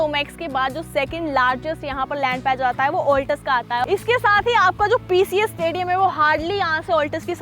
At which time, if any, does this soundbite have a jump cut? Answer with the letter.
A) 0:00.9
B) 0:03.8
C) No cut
B